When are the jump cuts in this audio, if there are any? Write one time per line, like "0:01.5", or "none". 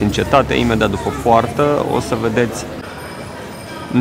0:02.8